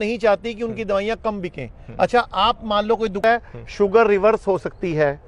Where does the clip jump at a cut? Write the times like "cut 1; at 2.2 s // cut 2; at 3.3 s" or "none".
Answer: cut 1; at 3.2 s